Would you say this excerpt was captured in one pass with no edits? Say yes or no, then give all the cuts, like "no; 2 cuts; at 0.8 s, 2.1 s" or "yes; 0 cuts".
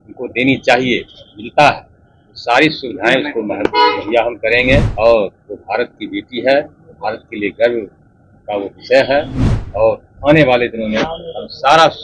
no; 1 cut; at 4.9 s